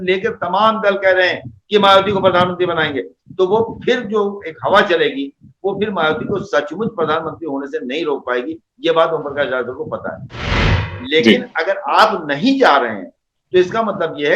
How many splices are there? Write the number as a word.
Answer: one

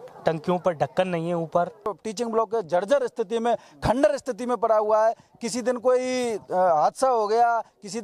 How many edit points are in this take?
one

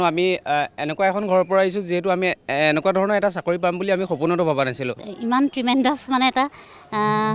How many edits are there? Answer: one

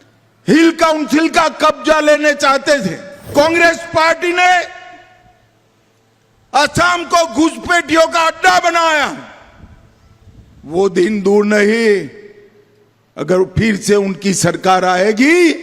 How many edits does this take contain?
one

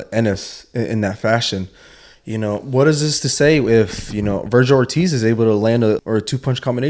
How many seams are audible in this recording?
one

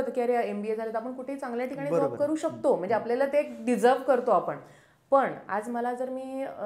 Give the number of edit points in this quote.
zero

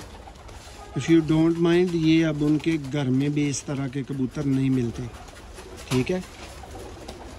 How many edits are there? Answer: zero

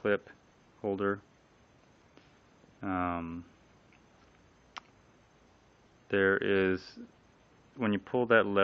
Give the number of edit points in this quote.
zero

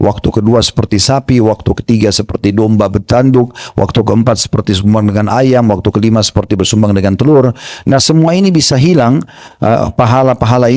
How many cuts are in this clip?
zero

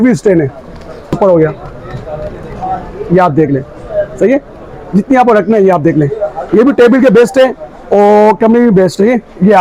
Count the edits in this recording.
one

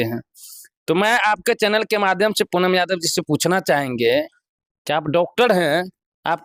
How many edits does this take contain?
zero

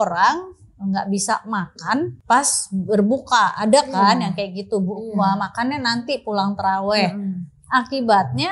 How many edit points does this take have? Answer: one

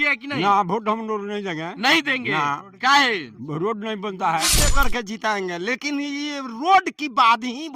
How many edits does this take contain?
one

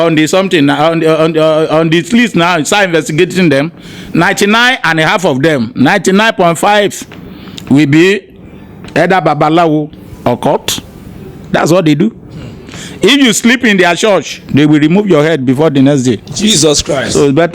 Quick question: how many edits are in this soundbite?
zero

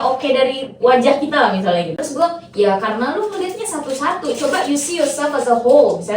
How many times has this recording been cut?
one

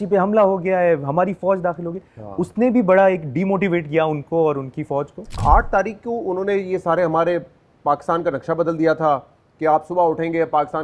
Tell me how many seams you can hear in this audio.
one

